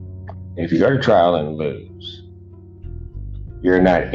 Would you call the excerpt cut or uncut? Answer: uncut